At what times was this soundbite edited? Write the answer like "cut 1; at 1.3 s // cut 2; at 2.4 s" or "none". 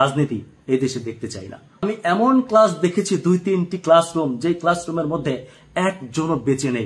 cut 1; at 1.8 s